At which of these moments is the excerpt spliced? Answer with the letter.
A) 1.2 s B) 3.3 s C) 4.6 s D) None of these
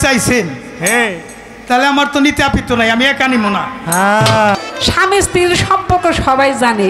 C